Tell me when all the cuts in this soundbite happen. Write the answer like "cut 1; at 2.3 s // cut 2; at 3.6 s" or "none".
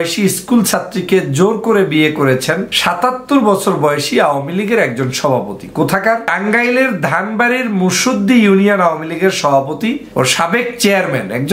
cut 1; at 2.7 s // cut 2; at 6.3 s // cut 3; at 10.0 s